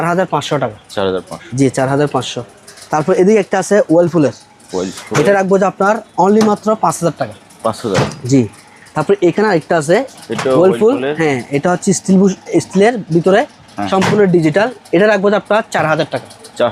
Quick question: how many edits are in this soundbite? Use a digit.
0